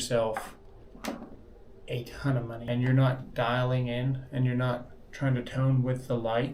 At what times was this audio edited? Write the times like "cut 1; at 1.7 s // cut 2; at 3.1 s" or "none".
cut 1; at 2.6 s